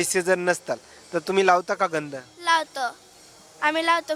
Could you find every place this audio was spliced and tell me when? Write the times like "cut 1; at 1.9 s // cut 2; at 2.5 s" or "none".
none